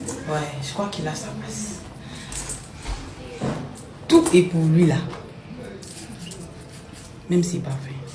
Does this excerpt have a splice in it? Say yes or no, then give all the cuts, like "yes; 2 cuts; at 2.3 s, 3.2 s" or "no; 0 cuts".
no; 0 cuts